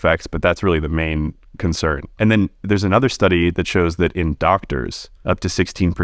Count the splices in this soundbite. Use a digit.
2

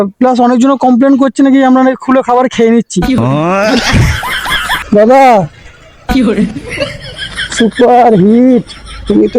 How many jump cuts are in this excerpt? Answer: 1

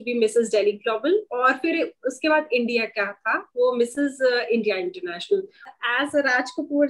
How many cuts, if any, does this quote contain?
1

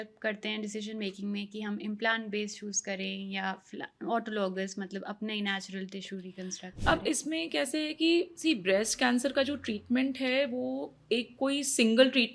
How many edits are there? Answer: 0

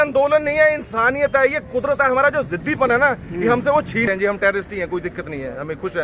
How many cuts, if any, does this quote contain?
1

